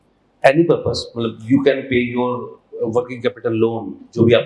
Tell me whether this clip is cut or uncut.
uncut